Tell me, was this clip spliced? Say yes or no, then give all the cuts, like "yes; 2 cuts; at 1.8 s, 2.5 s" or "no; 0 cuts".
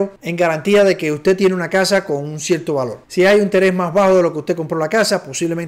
no; 0 cuts